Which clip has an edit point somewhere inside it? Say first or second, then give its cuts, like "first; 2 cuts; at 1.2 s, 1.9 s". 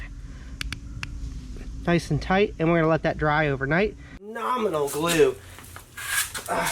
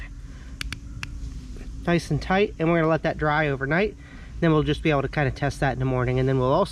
first; 1 cut; at 4.4 s